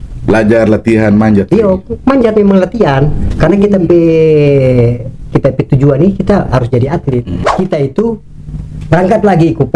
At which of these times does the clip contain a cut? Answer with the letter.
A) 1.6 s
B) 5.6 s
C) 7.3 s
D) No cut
C